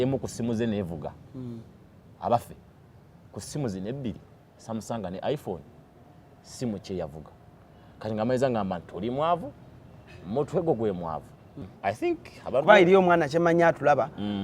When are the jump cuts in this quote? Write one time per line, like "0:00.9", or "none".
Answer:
0:11.8